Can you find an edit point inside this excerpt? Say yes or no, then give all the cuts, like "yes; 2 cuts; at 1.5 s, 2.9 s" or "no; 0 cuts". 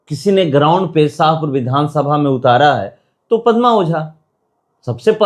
no; 0 cuts